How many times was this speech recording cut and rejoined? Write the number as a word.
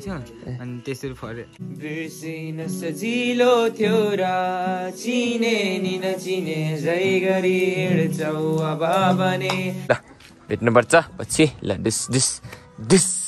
two